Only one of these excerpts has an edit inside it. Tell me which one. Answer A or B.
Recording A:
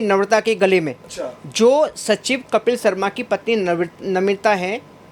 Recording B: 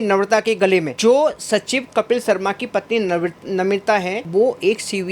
B